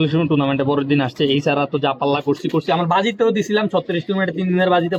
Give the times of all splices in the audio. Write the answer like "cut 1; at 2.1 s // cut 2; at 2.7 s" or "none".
none